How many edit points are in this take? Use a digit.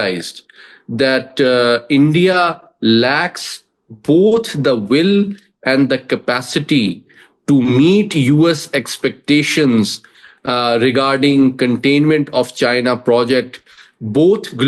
0